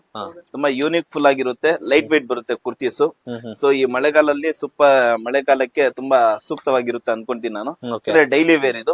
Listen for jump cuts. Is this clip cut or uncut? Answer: uncut